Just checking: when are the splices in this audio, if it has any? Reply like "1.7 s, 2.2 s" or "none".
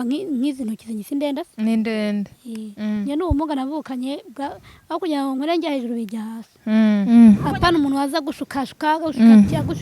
7.1 s